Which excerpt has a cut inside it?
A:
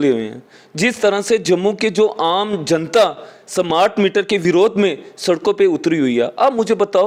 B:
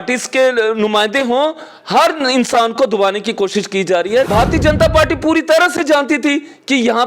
B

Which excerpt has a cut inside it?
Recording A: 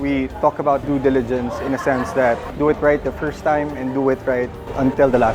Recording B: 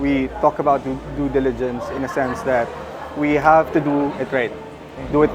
A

